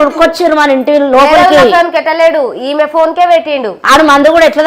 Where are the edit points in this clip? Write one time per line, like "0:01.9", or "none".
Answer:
0:03.7